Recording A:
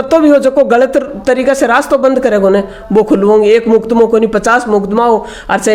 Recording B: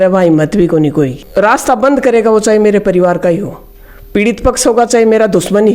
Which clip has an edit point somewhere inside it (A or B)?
B